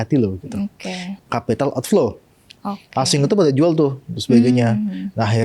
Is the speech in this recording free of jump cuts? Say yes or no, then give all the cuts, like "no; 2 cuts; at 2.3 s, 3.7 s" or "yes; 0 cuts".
no; 1 cut; at 1.1 s